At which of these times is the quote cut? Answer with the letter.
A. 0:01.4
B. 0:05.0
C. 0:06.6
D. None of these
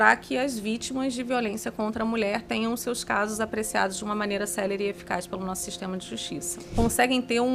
C